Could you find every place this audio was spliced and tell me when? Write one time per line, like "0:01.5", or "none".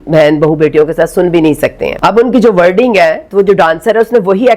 0:01.9